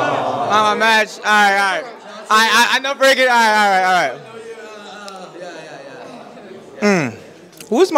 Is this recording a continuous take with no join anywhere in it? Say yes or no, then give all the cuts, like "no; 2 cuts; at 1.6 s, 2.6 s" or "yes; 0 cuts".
yes; 0 cuts